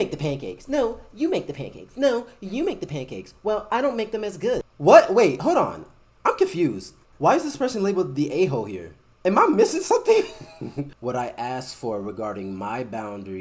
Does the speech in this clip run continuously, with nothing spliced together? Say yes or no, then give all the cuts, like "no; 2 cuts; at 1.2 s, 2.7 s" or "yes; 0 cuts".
no; 2 cuts; at 4.6 s, 10.9 s